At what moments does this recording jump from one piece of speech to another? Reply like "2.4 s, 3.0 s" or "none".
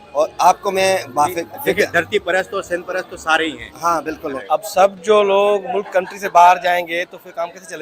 4.4 s